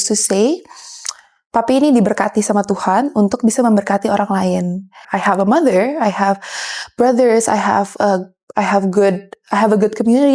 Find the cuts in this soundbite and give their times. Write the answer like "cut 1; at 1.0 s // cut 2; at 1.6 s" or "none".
cut 1; at 5.1 s